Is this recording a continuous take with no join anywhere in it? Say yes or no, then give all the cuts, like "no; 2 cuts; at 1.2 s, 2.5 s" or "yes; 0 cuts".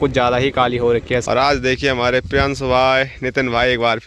no; 1 cut; at 1.2 s